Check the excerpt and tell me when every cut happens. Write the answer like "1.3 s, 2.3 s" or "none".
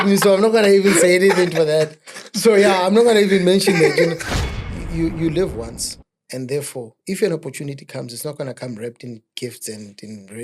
4.3 s